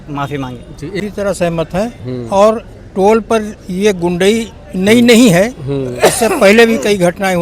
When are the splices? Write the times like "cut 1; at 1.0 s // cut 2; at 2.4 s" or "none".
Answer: cut 1; at 1.0 s

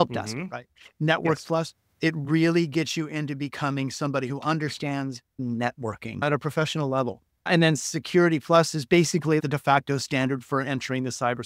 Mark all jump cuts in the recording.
cut 1; at 5.3 s // cut 2; at 6.2 s // cut 3; at 7.5 s // cut 4; at 9.4 s

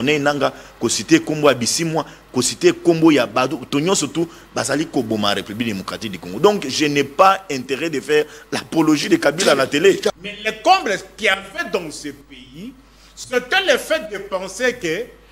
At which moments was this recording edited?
cut 1; at 10.1 s

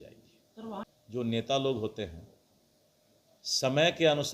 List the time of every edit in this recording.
cut 1; at 0.9 s

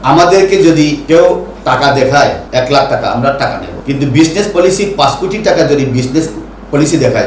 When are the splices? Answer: cut 1; at 1.0 s // cut 2; at 2.4 s // cut 3; at 3.7 s

